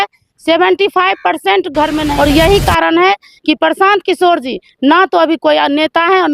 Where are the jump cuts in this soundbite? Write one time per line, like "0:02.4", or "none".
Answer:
0:02.1